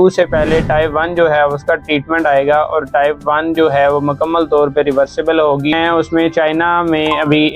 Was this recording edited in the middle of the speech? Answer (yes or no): yes